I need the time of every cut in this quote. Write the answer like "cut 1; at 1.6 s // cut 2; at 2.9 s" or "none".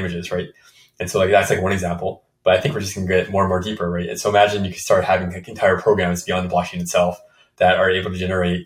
none